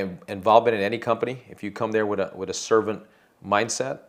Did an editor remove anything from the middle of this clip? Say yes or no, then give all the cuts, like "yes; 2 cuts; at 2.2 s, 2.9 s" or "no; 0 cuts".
no; 0 cuts